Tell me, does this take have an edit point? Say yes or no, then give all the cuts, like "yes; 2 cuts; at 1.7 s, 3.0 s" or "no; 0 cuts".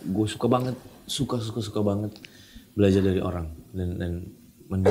no; 0 cuts